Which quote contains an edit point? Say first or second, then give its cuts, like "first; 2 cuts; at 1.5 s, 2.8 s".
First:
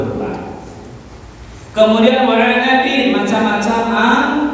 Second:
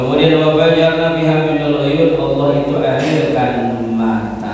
first; 1 cut; at 1.2 s